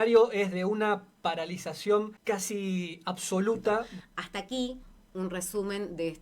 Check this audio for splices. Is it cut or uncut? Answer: cut